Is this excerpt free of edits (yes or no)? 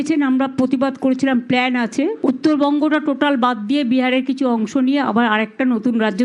yes